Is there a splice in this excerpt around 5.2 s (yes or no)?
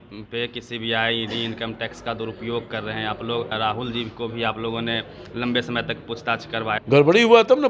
no